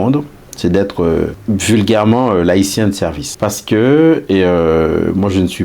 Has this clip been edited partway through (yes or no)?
yes